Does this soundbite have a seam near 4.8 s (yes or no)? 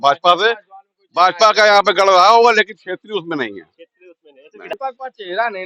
yes